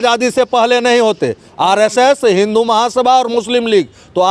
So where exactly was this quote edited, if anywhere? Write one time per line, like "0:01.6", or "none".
none